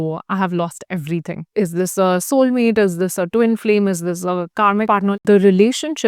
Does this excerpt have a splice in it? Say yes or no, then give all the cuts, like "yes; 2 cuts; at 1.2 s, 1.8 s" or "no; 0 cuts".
yes; 2 cuts; at 1.4 s, 4.9 s